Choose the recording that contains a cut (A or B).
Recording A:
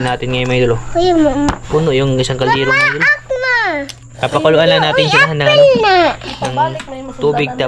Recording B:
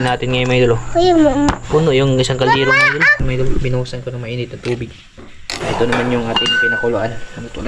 B